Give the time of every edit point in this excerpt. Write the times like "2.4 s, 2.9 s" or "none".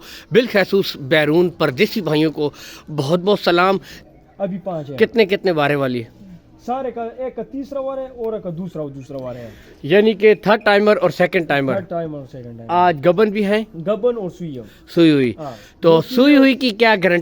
4.0 s